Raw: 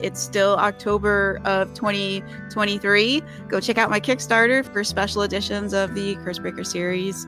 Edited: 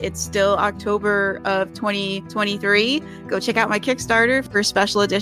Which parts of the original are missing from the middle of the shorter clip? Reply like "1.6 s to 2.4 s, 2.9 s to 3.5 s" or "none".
2.2 s to 2.4 s